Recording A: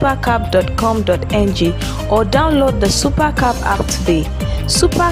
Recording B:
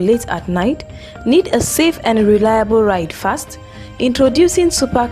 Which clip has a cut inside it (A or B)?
B